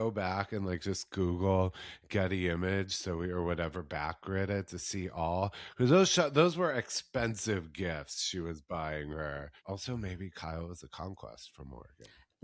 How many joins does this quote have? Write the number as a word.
one